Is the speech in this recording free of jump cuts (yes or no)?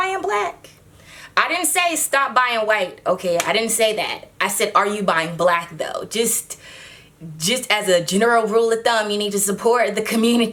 yes